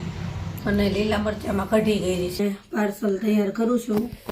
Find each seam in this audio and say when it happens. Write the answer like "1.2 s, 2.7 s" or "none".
2.4 s